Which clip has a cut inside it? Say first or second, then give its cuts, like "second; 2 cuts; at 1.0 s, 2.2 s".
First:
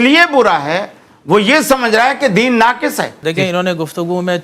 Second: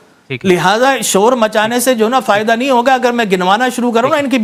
first; 1 cut; at 3.2 s